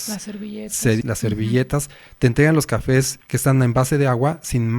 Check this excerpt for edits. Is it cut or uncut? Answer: cut